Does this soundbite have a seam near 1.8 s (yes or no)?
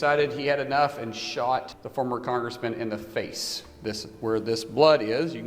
yes